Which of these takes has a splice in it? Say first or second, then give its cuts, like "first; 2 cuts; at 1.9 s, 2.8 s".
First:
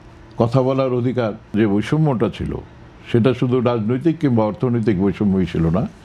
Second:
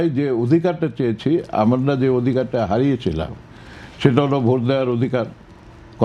first; 1 cut; at 1.5 s